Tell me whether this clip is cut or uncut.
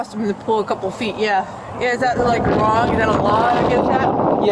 uncut